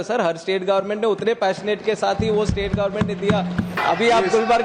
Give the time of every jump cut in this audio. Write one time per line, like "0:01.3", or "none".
0:03.8